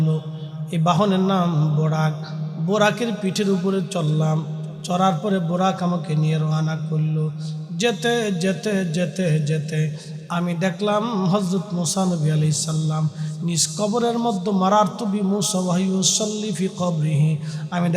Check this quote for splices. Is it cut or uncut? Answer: uncut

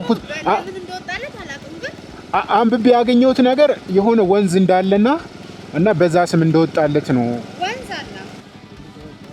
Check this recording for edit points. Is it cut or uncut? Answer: cut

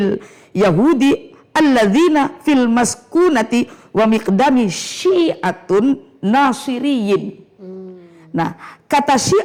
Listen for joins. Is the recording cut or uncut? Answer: uncut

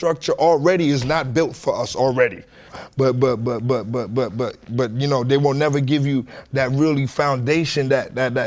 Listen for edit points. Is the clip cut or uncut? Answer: cut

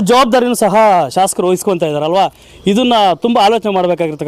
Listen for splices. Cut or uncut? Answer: uncut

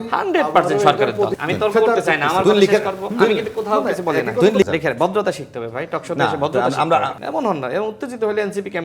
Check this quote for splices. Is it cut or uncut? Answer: cut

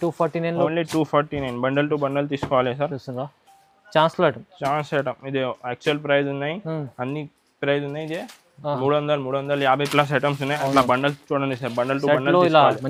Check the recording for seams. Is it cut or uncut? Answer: uncut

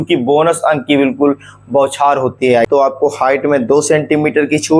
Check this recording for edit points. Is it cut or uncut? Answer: cut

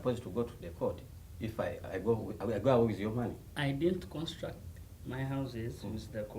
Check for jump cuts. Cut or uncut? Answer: uncut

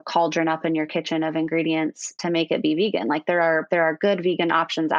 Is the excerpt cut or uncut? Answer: uncut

